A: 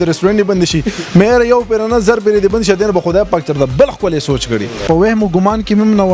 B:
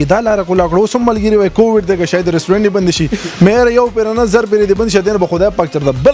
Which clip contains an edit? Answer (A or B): A